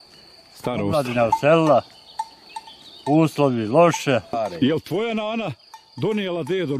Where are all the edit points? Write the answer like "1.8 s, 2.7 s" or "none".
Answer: 4.3 s